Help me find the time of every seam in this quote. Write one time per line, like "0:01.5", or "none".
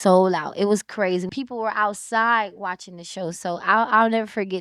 0:01.3